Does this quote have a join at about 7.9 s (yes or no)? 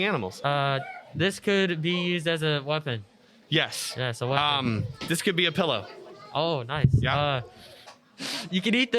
yes